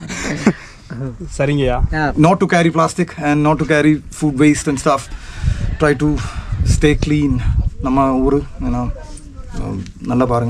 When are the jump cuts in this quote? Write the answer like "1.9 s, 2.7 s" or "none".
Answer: 2.1 s